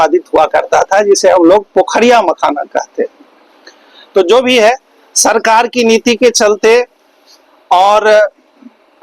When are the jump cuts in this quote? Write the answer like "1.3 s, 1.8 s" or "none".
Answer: none